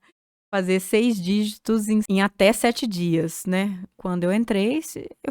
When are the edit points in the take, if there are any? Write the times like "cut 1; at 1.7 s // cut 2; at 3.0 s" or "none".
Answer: cut 1; at 2.1 s // cut 2; at 3.9 s